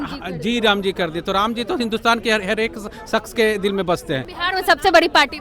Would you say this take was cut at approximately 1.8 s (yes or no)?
no